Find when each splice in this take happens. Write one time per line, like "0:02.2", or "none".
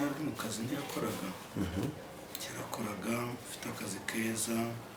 none